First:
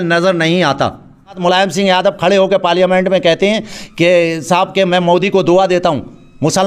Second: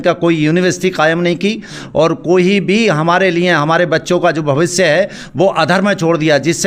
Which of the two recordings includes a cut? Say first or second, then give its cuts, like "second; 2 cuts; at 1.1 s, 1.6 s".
first; 1 cut; at 1.3 s